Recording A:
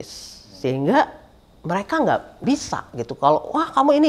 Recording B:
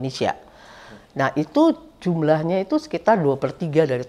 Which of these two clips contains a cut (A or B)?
A